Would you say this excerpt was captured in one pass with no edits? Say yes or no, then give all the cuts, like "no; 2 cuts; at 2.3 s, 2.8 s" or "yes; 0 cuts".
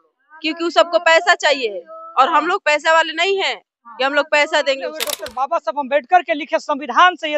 no; 1 cut; at 5.2 s